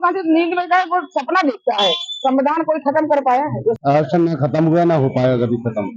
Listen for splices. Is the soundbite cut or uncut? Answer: cut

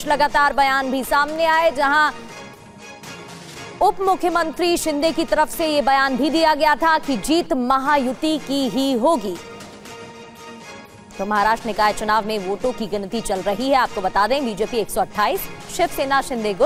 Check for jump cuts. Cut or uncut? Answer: uncut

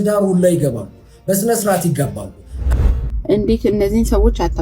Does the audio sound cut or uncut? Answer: cut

